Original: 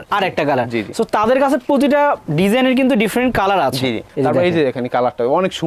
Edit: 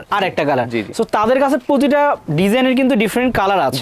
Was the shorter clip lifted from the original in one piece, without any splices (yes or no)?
yes